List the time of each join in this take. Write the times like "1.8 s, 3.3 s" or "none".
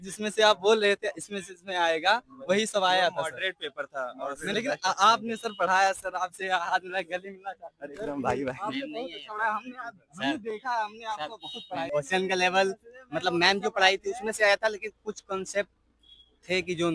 4.5 s, 11.9 s